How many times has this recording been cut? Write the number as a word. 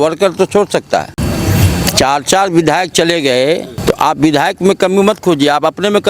two